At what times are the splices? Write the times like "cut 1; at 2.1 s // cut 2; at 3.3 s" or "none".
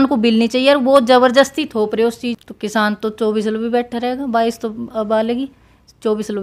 cut 1; at 2.4 s

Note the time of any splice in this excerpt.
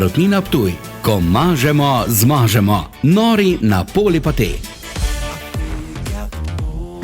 cut 1; at 5.4 s

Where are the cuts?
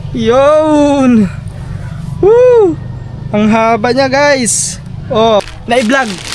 cut 1; at 5.4 s

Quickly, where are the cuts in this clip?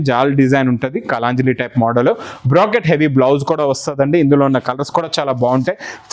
none

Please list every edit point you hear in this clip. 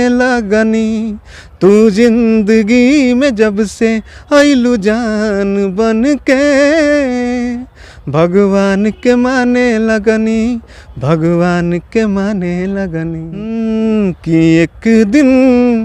cut 1; at 13.4 s

